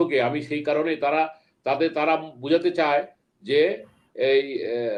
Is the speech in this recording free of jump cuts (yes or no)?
yes